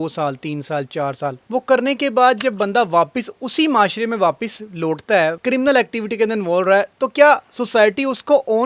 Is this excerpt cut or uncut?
cut